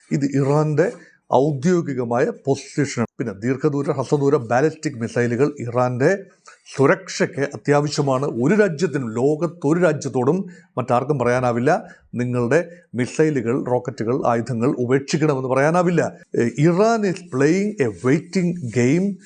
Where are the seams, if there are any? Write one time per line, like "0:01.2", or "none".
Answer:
0:03.1
0:16.2